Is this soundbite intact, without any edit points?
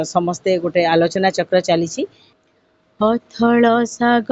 no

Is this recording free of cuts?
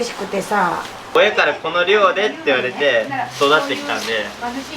no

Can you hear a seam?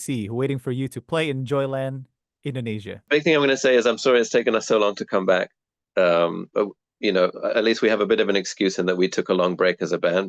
yes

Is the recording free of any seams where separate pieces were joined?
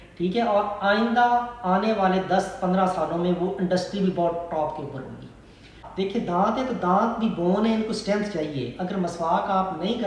no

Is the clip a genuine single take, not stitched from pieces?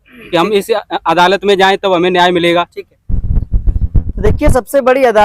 yes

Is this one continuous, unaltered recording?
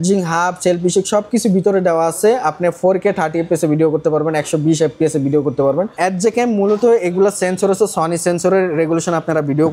no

